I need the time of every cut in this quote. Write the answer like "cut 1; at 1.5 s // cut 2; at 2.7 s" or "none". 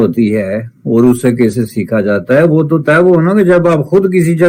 none